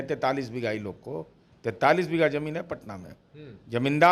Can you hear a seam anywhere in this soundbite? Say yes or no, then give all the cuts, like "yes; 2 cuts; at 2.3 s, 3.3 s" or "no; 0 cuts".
no; 0 cuts